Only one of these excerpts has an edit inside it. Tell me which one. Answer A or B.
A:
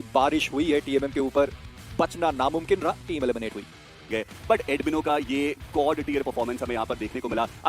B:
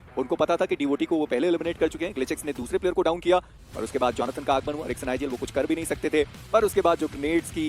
A